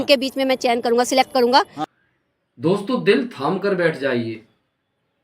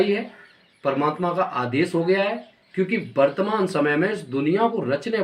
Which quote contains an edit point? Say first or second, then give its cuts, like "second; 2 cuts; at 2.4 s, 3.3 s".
first; 1 cut; at 1.8 s